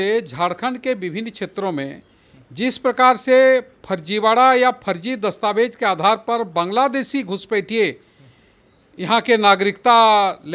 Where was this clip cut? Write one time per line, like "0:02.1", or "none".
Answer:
none